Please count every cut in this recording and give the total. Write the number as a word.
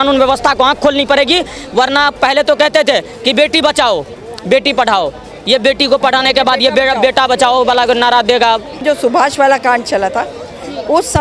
one